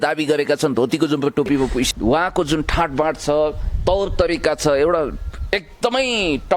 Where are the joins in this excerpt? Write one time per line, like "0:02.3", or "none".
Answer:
0:01.9